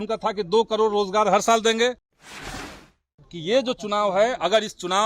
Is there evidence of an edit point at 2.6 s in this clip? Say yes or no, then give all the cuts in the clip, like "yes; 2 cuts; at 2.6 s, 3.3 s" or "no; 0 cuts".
yes; 1 cut; at 2.6 s